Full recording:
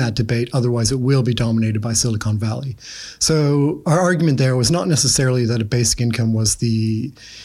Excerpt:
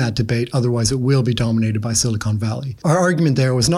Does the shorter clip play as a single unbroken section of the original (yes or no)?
no